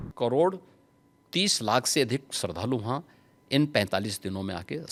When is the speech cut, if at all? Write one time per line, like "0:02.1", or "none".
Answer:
none